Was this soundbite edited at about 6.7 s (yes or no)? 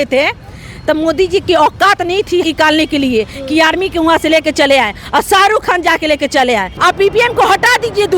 yes